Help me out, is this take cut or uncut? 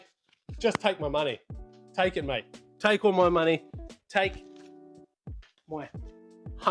uncut